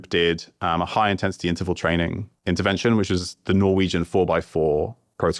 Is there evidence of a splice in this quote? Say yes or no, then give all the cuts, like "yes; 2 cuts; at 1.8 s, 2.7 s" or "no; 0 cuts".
no; 0 cuts